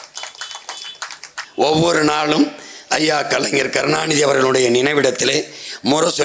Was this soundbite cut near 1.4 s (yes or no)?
yes